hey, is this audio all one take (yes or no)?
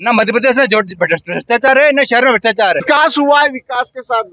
no